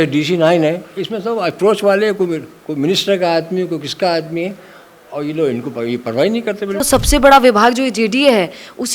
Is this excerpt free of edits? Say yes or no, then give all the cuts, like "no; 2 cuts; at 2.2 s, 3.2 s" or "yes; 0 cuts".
no; 1 cut; at 6.9 s